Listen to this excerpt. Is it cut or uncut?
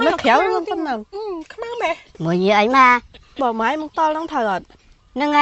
cut